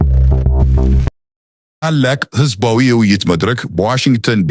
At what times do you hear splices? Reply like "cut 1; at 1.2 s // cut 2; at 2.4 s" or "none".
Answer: cut 1; at 1.1 s